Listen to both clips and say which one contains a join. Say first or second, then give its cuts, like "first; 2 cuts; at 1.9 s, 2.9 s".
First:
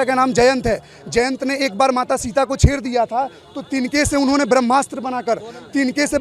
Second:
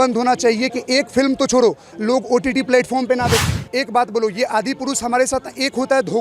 second; 1 cut; at 3.4 s